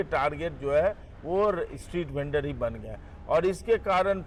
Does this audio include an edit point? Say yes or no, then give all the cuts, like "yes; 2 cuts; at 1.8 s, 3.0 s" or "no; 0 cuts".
no; 0 cuts